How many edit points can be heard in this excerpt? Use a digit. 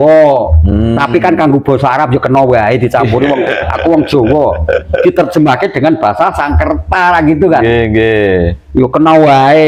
0